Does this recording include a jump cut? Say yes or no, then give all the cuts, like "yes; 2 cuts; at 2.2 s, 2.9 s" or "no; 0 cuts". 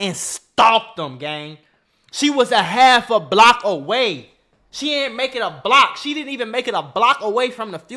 no; 0 cuts